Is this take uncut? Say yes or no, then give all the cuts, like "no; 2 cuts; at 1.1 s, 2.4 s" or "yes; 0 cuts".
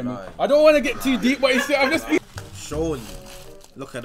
no; 1 cut; at 2.2 s